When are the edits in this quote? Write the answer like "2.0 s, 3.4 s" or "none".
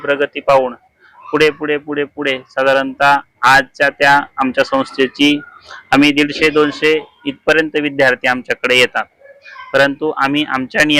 none